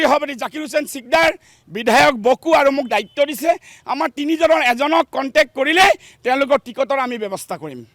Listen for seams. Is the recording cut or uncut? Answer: uncut